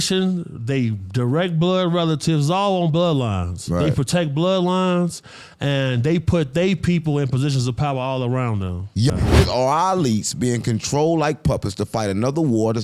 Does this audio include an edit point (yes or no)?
yes